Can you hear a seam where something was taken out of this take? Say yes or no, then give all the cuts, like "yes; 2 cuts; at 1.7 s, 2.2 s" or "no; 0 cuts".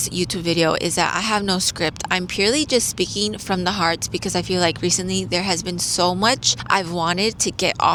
no; 0 cuts